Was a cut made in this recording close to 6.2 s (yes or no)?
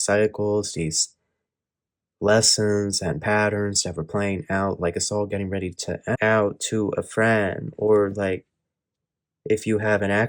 yes